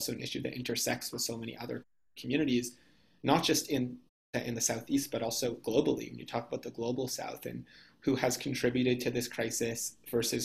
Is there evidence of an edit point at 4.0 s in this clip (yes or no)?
yes